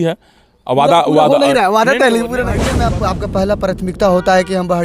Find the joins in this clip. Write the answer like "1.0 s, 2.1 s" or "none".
2.8 s